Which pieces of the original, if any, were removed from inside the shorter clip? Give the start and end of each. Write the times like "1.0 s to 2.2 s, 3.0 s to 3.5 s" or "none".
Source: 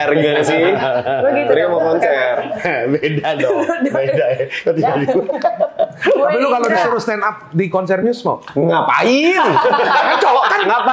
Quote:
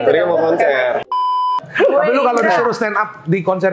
2.9 s to 5.8 s